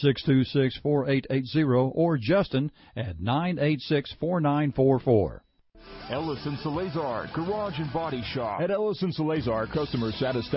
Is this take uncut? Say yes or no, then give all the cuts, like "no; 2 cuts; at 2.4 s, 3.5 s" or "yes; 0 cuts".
no; 1 cut; at 5.5 s